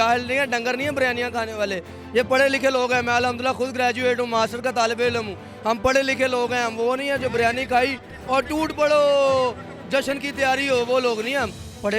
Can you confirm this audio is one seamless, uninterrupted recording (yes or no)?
yes